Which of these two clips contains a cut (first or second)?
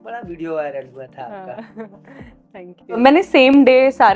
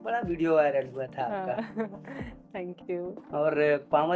first